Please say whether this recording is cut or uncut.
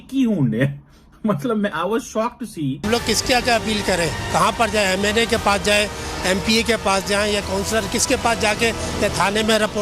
cut